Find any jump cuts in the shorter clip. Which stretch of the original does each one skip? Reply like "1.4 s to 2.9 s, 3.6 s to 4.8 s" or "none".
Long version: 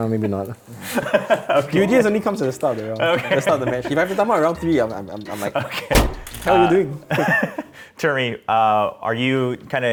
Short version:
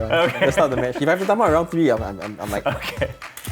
none